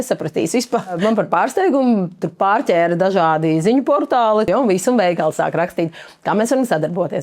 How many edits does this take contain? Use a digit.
2